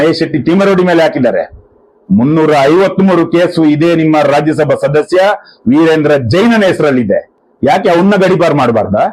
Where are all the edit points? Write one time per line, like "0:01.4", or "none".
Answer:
none